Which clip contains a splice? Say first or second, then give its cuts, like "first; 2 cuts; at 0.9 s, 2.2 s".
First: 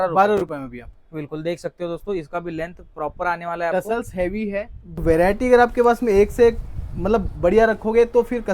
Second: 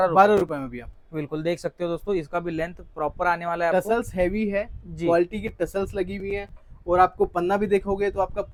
first; 1 cut; at 4.8 s